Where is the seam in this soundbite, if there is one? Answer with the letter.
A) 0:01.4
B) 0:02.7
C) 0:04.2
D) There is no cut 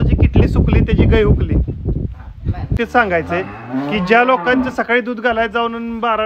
B